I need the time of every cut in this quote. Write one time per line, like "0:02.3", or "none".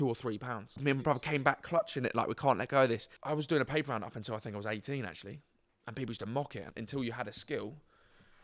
0:00.8
0:03.1
0:06.7